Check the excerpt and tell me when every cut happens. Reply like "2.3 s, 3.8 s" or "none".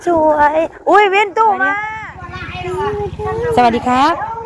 1.8 s